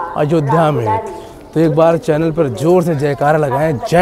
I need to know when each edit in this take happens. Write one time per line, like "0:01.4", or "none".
none